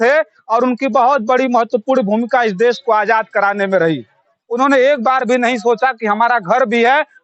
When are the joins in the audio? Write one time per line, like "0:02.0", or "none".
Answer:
0:04.4